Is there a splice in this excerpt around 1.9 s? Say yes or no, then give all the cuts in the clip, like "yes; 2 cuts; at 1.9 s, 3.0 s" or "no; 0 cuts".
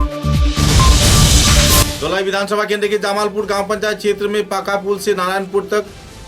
yes; 1 cut; at 1.9 s